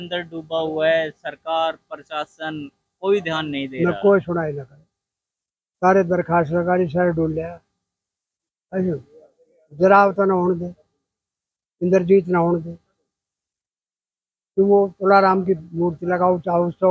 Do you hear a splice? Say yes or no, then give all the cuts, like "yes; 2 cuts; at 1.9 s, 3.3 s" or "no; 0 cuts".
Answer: no; 0 cuts